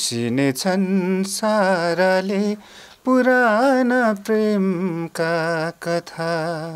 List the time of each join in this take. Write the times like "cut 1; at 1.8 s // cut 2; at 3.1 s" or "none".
none